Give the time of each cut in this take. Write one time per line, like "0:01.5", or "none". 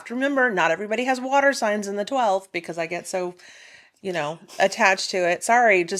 none

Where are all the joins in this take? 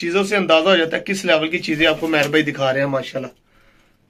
none

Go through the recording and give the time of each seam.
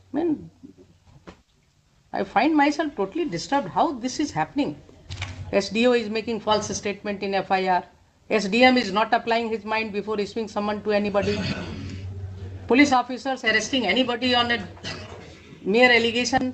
none

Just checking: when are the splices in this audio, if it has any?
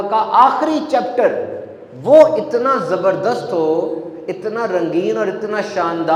none

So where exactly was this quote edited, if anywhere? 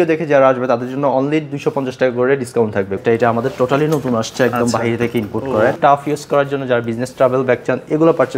0:03.0
0:05.8

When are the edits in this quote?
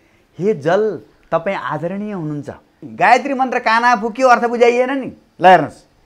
0:02.8

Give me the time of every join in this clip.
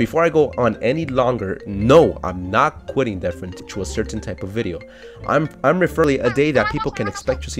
0:03.6
0:06.0

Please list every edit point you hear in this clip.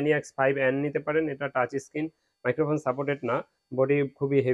none

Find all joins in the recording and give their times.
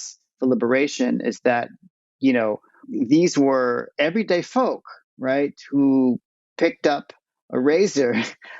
0:02.8

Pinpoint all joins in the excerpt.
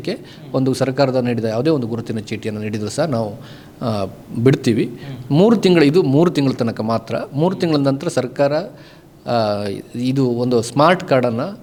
none

